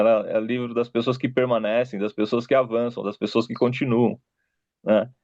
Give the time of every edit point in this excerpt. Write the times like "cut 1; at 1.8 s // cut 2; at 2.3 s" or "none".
none